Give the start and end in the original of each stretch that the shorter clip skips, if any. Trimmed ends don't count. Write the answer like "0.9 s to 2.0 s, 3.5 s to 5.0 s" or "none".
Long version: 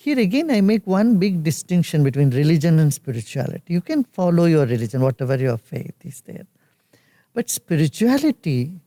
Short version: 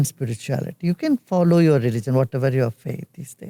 none